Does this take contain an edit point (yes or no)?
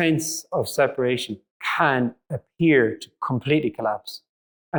no